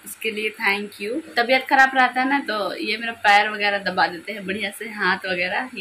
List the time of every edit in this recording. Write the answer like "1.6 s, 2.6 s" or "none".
1.4 s